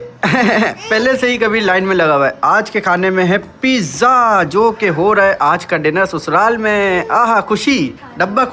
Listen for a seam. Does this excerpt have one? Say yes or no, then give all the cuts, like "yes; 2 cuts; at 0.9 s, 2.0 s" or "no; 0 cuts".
no; 0 cuts